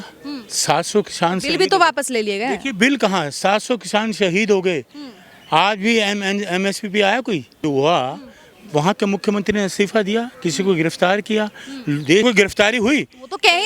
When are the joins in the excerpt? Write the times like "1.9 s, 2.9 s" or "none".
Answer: 7.6 s, 12.2 s